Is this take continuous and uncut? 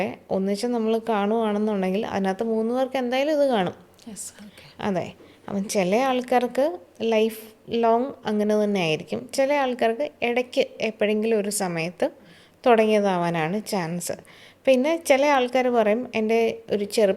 yes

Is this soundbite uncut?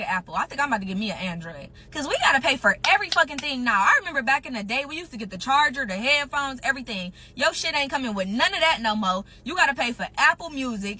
yes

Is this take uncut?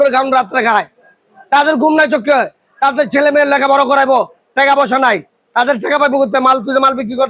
yes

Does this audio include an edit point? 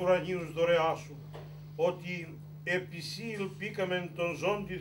no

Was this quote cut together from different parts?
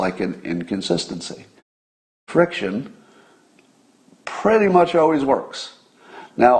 yes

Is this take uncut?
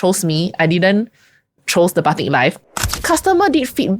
no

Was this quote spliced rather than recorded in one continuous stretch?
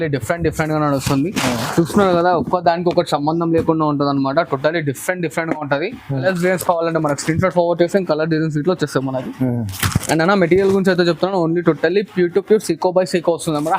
yes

